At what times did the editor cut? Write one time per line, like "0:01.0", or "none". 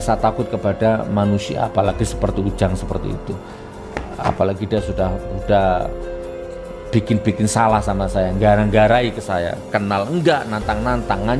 none